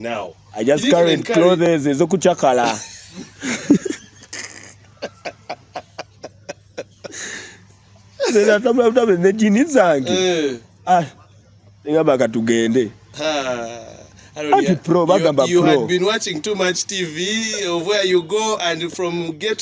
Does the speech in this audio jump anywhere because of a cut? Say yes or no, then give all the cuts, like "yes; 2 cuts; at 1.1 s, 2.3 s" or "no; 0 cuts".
no; 0 cuts